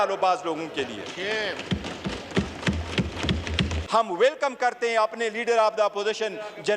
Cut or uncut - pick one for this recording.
cut